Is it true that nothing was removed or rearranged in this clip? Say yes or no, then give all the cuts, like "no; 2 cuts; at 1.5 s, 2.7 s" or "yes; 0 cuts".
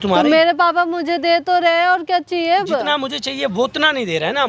yes; 0 cuts